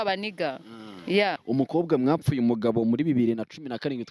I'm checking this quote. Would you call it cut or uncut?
cut